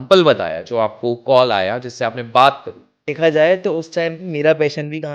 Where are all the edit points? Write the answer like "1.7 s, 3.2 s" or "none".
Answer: 3.1 s